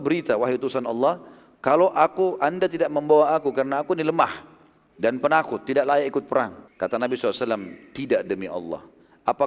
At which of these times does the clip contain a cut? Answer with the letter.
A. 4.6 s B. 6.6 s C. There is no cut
B